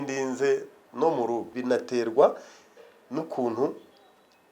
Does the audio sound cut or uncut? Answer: cut